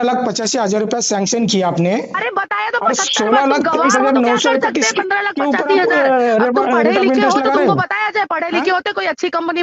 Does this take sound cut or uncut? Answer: uncut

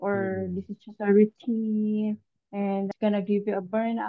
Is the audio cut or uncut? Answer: cut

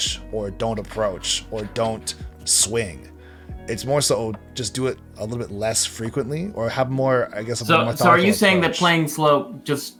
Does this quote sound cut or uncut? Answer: uncut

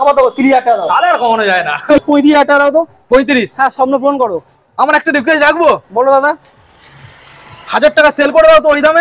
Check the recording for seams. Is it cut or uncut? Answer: cut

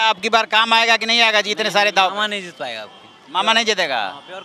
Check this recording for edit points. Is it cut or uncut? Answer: uncut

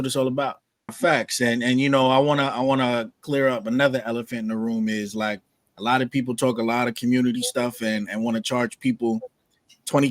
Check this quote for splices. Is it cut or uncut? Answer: cut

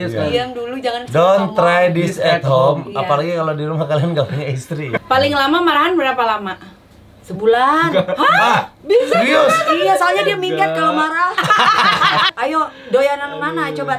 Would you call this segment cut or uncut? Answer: cut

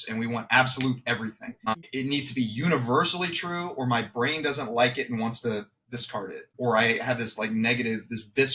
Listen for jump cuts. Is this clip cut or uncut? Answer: cut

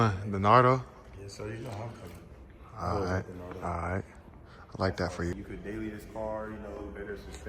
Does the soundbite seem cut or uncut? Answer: cut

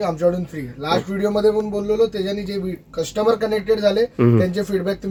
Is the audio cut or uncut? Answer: uncut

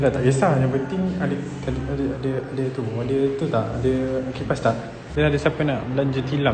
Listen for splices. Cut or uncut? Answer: cut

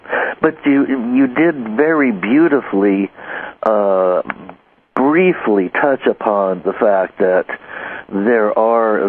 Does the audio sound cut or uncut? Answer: cut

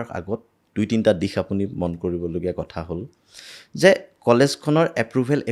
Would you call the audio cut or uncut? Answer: uncut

